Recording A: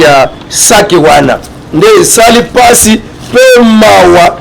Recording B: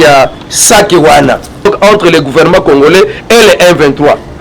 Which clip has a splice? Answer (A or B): B